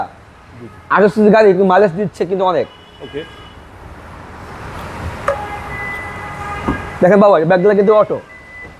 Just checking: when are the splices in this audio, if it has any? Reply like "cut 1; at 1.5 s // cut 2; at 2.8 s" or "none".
none

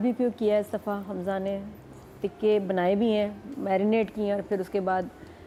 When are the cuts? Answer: none

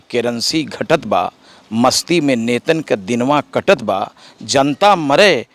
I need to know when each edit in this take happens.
none

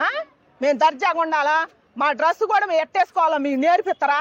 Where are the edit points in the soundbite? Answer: none

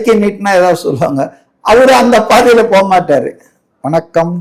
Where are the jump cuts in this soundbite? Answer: none

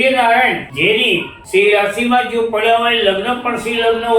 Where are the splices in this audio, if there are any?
cut 1; at 1.1 s

